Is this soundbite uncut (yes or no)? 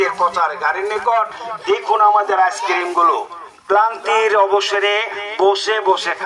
yes